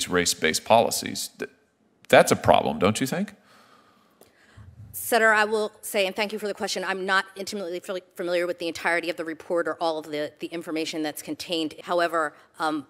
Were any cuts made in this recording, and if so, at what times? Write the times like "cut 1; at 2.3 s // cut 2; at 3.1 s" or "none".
cut 1; at 11.8 s